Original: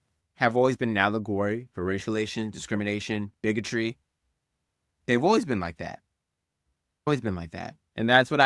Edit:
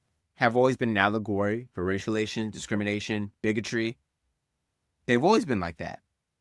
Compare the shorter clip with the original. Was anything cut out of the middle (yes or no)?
no